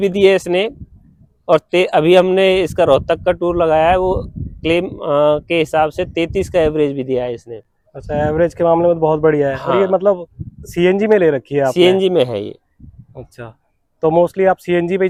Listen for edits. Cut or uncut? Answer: uncut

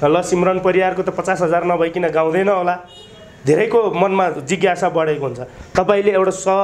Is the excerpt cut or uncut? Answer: uncut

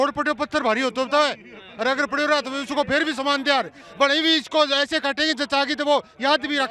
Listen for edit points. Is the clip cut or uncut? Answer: uncut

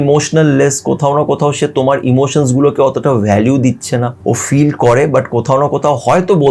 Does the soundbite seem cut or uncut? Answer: cut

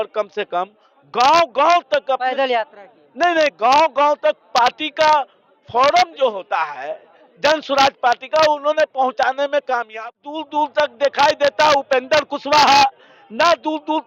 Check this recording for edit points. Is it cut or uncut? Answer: cut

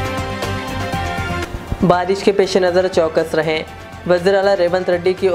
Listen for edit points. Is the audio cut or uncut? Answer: cut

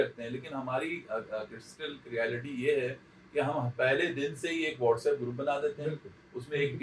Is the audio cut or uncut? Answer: uncut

